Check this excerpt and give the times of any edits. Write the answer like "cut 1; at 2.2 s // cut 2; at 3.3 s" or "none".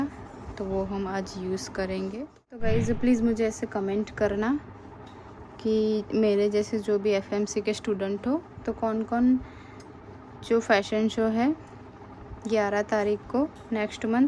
cut 1; at 2.6 s